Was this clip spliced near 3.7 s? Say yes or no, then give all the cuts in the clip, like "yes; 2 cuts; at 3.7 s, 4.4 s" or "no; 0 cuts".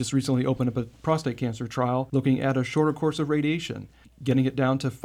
no; 1 cut; at 2.1 s